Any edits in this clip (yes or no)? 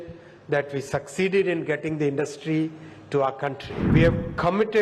yes